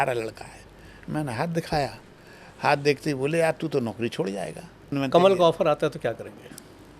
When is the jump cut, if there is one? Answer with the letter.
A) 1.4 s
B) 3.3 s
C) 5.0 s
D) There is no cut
C